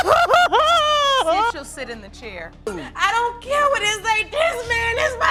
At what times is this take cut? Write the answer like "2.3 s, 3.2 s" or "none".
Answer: none